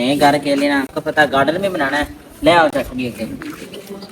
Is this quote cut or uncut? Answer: uncut